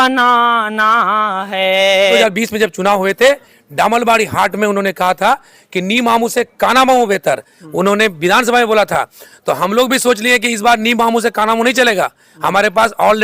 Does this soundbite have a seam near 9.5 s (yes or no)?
no